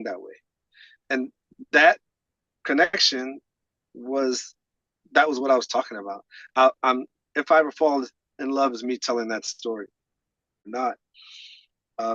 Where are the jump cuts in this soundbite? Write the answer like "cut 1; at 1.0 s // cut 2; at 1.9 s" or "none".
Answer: cut 1; at 10.6 s